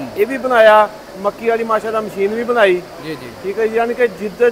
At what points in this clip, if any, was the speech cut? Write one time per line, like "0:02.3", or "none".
none